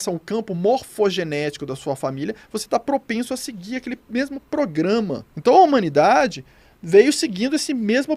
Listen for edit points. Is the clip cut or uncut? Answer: cut